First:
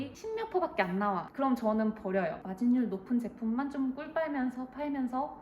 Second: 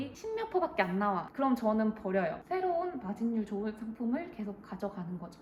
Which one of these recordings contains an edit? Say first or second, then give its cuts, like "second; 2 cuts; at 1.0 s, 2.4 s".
first; 1 cut; at 2.4 s